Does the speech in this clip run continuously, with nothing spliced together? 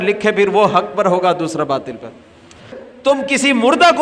no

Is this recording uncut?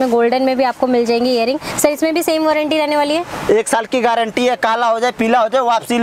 yes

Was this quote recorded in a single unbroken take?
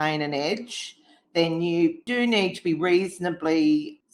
no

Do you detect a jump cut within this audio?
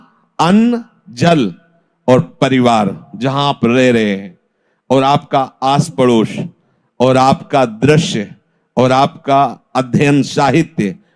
no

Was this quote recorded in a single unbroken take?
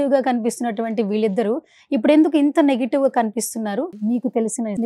no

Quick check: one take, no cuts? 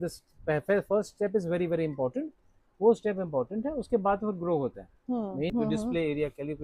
no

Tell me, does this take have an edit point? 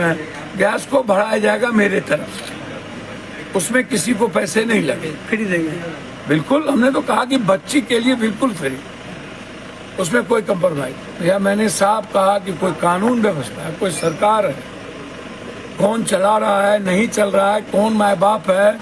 no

